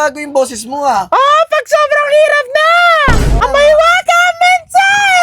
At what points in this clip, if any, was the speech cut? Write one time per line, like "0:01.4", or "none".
0:03.4